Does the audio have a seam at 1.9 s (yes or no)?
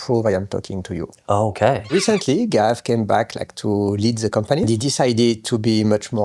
yes